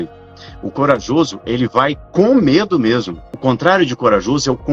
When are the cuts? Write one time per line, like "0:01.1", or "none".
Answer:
0:03.3